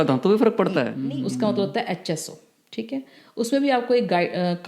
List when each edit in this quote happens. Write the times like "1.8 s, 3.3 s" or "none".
0.9 s

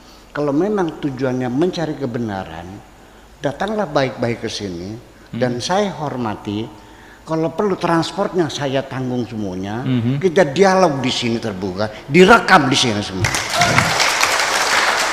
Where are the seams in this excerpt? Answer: none

